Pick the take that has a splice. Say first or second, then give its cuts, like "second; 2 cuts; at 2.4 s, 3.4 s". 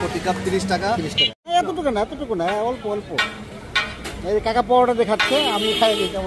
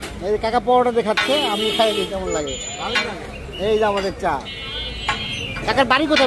first; 1 cut; at 1.5 s